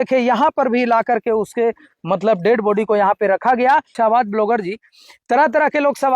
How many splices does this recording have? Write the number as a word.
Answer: one